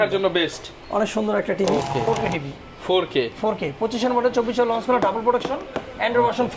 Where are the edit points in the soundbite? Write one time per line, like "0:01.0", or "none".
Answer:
0:02.0

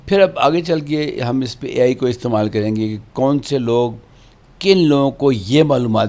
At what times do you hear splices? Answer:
none

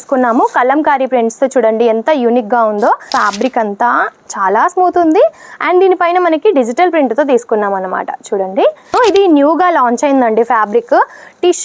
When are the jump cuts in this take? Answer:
0:03.0
0:08.9

